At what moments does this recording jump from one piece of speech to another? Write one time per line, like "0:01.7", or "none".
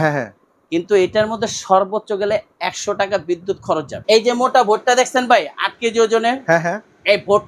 0:03.9

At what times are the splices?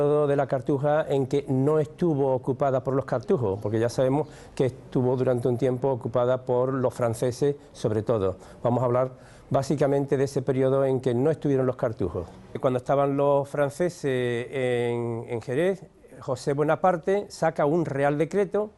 0:12.5

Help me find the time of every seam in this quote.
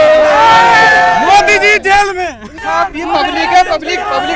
0:02.5

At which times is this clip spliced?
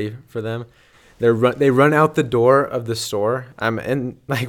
0:00.9

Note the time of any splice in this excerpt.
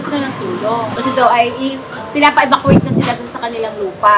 0:00.9

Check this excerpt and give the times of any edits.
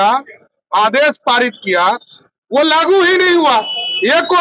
none

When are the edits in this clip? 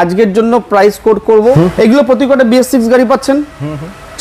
0:01.6

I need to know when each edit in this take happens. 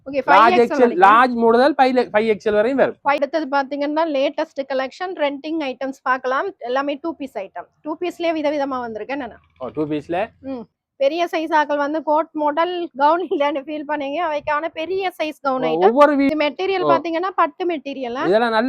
0:03.2
0:10.7
0:16.3

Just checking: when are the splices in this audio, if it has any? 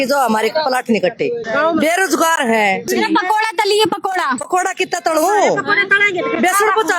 0:01.4
0:02.9
0:04.4

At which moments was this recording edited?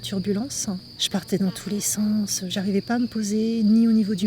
0:00.9
0:02.5

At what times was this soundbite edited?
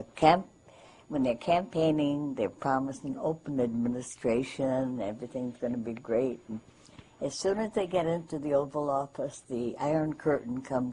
0:05.3

